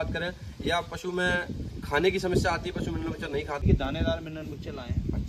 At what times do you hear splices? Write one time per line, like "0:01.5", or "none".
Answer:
0:03.6